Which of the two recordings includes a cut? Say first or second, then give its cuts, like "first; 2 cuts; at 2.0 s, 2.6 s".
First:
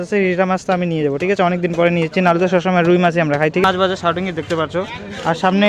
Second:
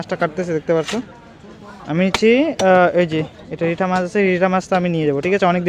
first; 1 cut; at 3.6 s